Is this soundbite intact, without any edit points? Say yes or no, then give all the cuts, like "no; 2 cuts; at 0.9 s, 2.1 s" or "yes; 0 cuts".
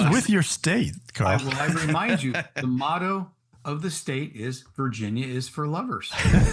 yes; 0 cuts